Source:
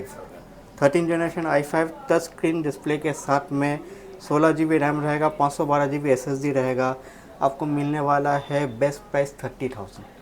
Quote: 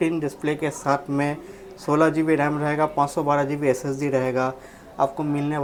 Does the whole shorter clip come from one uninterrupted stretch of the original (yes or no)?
yes